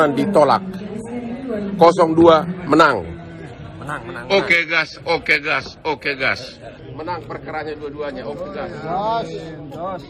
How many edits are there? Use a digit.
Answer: 1